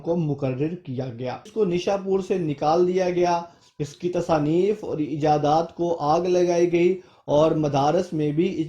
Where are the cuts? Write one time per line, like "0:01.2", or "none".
0:01.5